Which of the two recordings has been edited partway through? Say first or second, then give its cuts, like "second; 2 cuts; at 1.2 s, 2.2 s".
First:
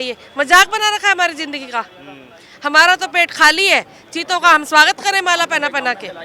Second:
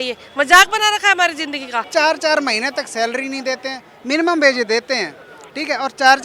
second; 1 cut; at 1.9 s